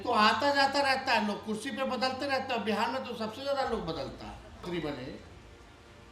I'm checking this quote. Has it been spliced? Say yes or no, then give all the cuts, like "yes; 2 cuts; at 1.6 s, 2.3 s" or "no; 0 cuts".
yes; 1 cut; at 4.6 s